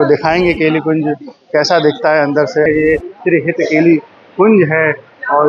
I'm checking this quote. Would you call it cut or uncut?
cut